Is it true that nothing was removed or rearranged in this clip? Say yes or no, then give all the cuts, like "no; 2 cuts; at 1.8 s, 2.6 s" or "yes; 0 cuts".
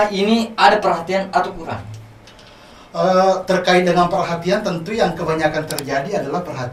yes; 0 cuts